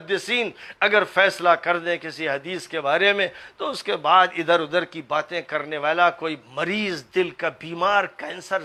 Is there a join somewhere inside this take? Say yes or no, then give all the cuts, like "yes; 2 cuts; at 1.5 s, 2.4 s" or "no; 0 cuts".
no; 0 cuts